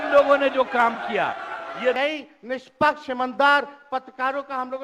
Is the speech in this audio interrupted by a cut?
yes; 1 cut; at 2.0 s

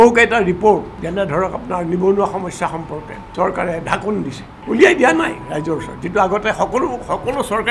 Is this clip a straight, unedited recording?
no; 3 cuts; at 1.0 s, 3.2 s, 4.5 s

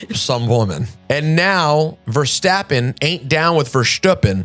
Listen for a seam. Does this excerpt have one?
yes; 2 cuts; at 0.9 s, 2.0 s

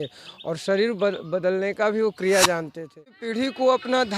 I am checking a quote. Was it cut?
yes; 1 cut; at 3.2 s

